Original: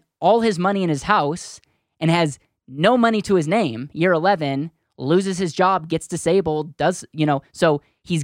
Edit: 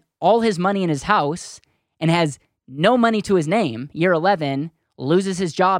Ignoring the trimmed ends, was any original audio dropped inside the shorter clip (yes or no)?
no